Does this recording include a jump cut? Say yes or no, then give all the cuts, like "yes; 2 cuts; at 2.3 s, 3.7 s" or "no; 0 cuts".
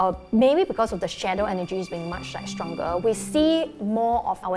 no; 0 cuts